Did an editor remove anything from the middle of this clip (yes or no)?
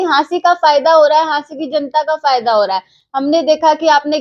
no